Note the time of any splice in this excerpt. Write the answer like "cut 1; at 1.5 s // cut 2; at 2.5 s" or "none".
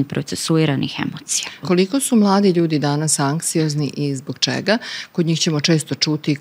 cut 1; at 1.6 s